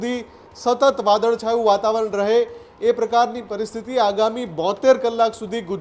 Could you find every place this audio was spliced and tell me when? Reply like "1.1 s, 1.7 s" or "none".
none

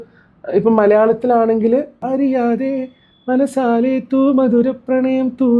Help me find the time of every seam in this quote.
2.0 s

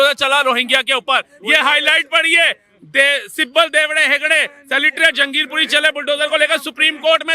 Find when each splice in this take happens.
none

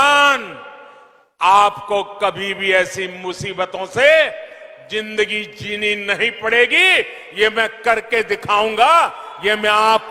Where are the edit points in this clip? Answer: none

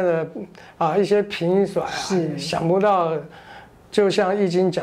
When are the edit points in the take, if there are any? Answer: none

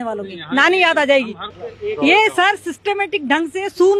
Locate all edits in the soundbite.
none

